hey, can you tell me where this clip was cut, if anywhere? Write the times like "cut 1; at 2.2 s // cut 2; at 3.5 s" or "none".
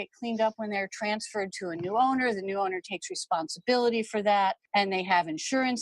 cut 1; at 4.6 s

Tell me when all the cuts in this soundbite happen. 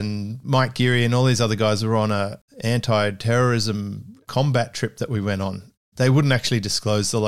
cut 1; at 5.8 s

